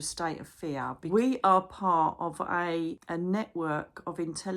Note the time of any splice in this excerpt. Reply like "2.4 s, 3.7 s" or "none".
1.1 s, 3.0 s

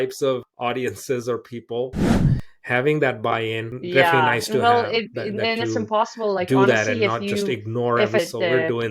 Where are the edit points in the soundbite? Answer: 2.3 s

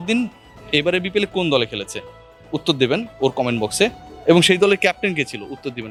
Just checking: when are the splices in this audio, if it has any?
none

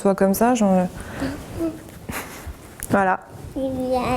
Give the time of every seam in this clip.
2.9 s

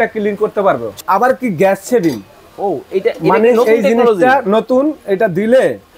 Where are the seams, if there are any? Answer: 1.0 s

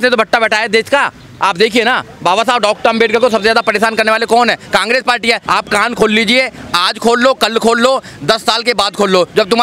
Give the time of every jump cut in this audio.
5.4 s

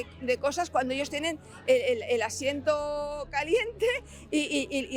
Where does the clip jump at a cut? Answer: none

